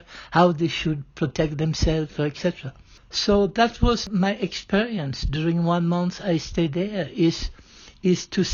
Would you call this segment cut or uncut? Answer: uncut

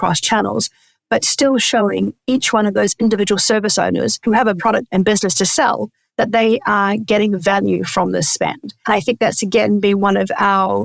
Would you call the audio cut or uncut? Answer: cut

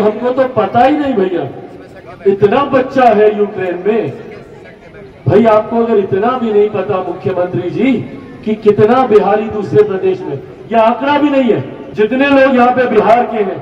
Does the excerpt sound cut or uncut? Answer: cut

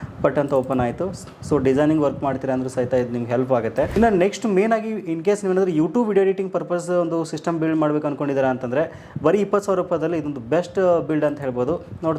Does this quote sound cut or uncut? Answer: cut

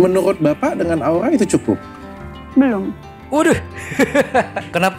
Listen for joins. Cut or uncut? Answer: uncut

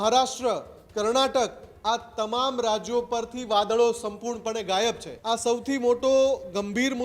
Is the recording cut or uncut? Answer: cut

